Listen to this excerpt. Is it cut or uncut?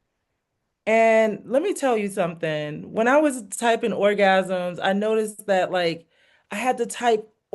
uncut